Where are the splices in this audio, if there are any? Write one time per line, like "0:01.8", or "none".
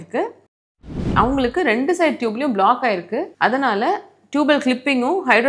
0:00.9
0:03.3